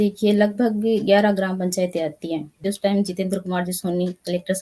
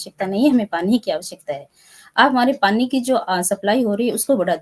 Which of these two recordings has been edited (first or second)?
first